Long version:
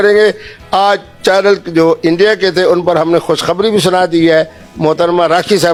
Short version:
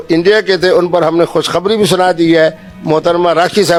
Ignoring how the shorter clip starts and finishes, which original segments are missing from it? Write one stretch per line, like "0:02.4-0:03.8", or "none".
none